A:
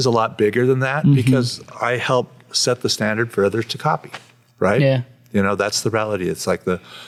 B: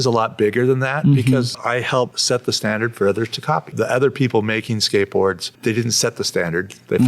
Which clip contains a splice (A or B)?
B